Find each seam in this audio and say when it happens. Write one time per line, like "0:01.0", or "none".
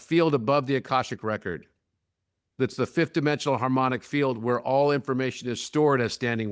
none